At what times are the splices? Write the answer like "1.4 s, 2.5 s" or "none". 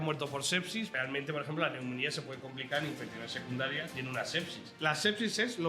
0.9 s, 4.4 s

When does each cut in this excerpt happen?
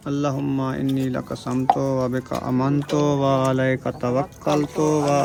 none

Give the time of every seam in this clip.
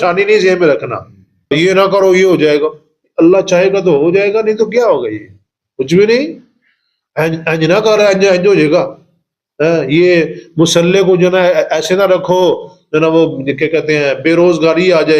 1.5 s

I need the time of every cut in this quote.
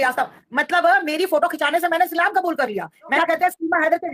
3.1 s

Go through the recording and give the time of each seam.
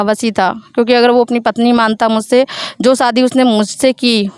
none

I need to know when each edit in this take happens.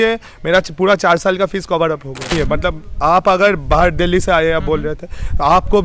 2.3 s

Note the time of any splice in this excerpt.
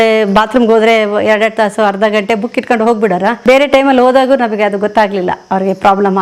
3.4 s

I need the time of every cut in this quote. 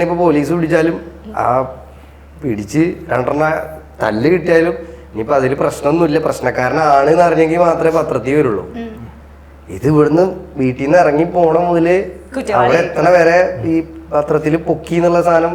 none

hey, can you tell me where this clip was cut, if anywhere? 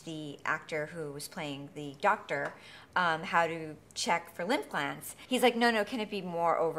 5.1 s

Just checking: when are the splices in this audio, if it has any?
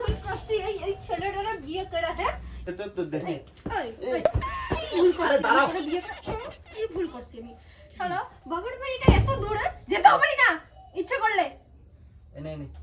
none

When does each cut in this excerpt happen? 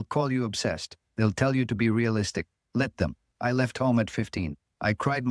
3.2 s

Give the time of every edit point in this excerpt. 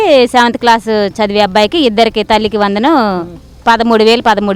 none

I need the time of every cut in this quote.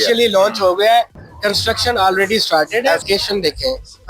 3.0 s

